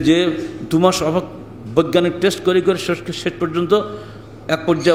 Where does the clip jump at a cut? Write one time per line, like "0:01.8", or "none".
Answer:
none

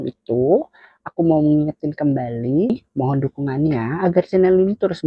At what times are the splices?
0:02.7

